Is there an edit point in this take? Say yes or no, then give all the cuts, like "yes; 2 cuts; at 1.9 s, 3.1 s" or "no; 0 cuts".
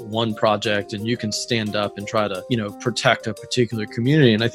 yes; 1 cut; at 2.4 s